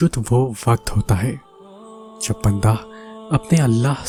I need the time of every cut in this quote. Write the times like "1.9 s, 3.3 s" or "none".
none